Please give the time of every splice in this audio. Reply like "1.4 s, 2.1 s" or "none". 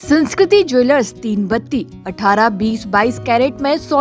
none